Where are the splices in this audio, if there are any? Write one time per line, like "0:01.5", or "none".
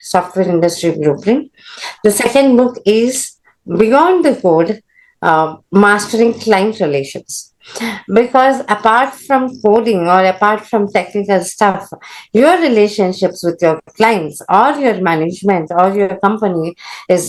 none